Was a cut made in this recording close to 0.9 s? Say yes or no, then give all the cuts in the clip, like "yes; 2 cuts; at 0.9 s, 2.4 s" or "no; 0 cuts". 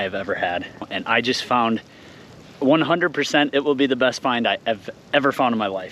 yes; 1 cut; at 0.9 s